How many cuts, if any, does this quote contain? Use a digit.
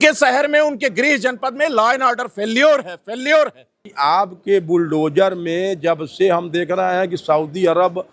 1